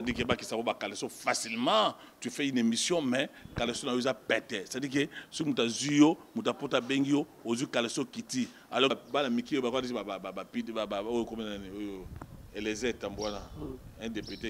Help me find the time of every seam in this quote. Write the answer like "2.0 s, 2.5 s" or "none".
8.9 s